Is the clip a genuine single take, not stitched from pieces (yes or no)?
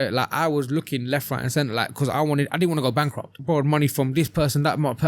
no